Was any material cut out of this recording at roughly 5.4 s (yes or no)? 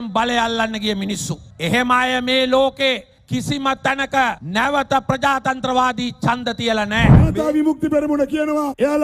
no